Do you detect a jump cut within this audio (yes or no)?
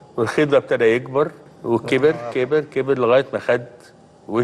yes